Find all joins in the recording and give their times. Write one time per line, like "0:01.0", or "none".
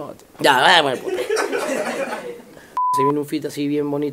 0:02.9